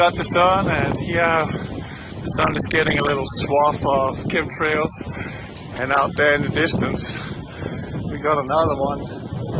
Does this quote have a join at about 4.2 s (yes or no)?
yes